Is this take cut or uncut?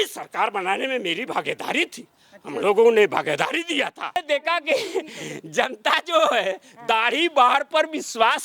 cut